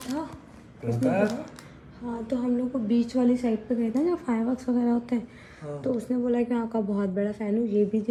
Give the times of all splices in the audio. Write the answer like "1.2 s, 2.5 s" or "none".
none